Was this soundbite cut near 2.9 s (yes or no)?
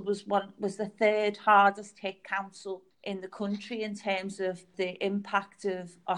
yes